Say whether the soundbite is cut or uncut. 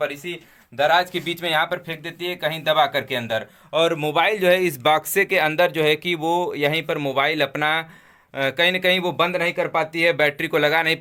uncut